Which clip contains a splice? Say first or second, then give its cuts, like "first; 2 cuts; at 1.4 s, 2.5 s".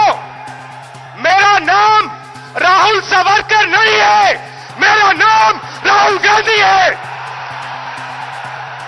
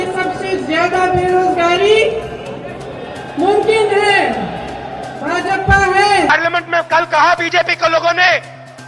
second; 1 cut; at 6.3 s